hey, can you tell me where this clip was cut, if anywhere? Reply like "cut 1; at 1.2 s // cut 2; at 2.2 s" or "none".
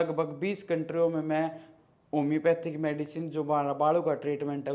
none